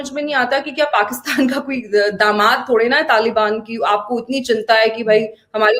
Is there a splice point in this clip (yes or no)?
no